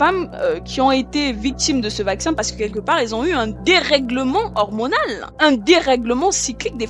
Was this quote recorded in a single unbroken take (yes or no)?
no